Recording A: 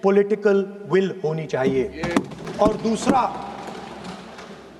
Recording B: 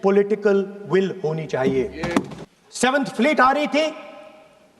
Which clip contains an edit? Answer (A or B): B